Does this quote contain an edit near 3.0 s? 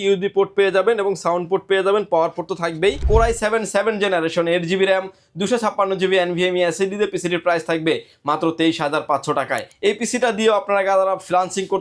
yes; 2 cuts; at 3.0 s, 9.7 s

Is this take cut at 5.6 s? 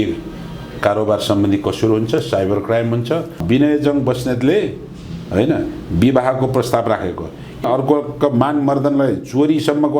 no; 2 cuts; at 3.4 s, 7.6 s

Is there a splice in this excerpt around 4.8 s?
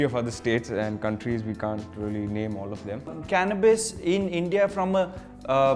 no; 1 cut; at 2.9 s

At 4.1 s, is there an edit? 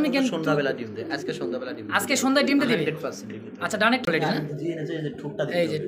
yes; 1 cut; at 4.1 s

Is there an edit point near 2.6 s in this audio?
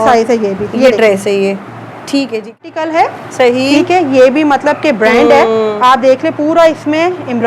yes; 1 cut; at 2.6 s

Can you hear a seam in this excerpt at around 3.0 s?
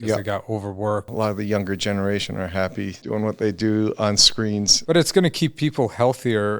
yes; 2 cuts; at 1.1 s, 3.0 s

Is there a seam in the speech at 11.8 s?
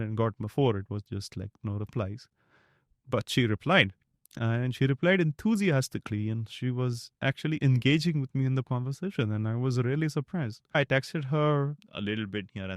yes; 2 cuts; at 10.7 s, 11.8 s

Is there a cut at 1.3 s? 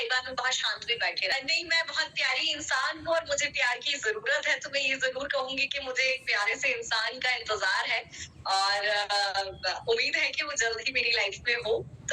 yes; 1 cut; at 1.3 s

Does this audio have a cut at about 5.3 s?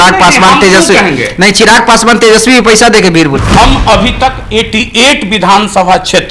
no; 1 cut; at 3.4 s

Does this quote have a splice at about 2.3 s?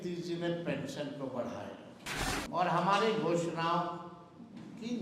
yes; 1 cut; at 2.3 s

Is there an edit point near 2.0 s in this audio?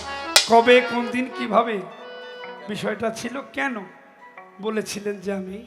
no; 0 cuts

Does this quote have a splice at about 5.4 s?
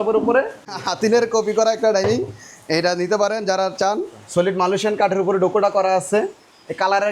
no; 2 cuts; at 0.8 s, 4.2 s

